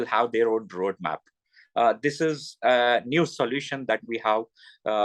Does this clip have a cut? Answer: no; 0 cuts

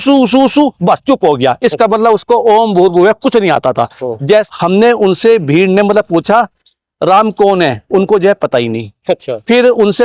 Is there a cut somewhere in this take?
yes; 1 cut; at 4.5 s

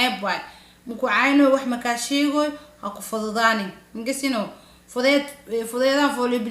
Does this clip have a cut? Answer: no; 0 cuts

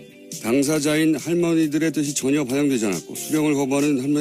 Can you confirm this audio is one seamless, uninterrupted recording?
yes; 0 cuts

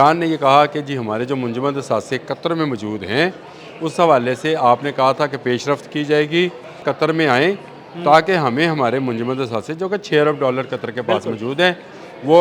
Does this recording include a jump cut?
yes; 1 cut; at 6.9 s

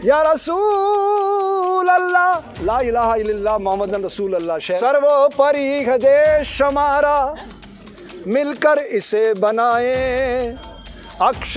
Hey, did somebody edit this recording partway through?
yes; 1 cut; at 4.8 s

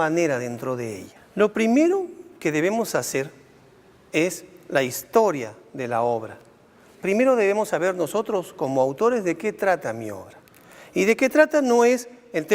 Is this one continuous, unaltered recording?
no; 1 cut; at 1.3 s

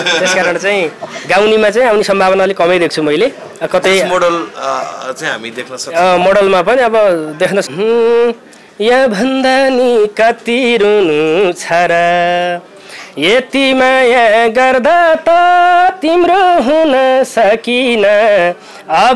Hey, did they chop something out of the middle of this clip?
yes; 1 cut; at 7.6 s

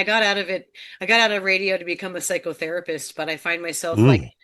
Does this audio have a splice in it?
no; 0 cuts

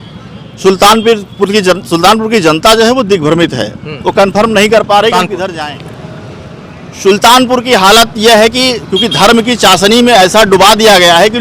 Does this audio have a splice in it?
yes; 1 cut; at 5.5 s

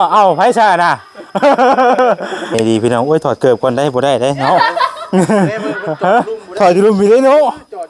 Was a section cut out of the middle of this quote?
yes; 1 cut; at 2.5 s

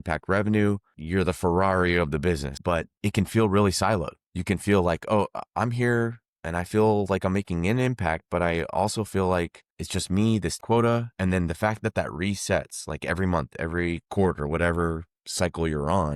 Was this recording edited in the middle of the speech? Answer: yes; 3 cuts; at 0.9 s, 2.5 s, 10.6 s

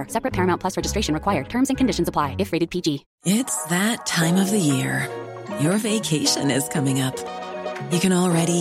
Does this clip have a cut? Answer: yes; 1 cut; at 3.1 s

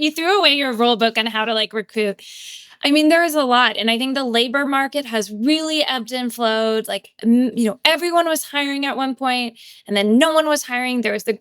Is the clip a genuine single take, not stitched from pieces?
yes; 0 cuts

